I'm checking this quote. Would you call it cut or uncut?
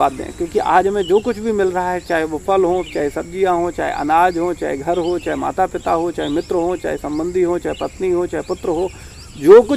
uncut